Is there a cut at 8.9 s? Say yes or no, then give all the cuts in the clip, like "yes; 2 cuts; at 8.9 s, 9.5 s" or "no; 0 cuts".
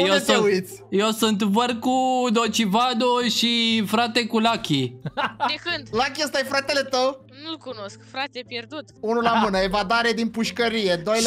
yes; 1 cut; at 8.9 s